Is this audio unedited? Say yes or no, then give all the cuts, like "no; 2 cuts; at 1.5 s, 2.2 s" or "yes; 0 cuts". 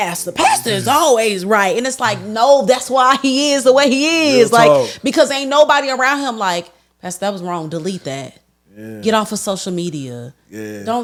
yes; 0 cuts